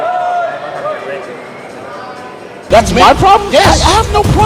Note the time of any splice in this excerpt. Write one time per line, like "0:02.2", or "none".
0:02.6